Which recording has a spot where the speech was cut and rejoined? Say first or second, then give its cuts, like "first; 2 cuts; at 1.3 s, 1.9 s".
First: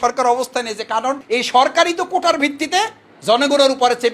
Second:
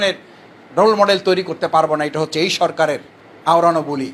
first; 1 cut; at 1.2 s